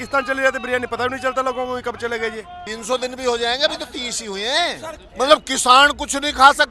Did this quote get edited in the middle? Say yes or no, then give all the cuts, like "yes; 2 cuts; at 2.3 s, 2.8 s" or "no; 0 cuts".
yes; 2 cuts; at 2.6 s, 4.9 s